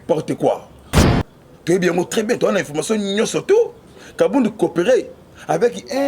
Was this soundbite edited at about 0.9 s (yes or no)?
yes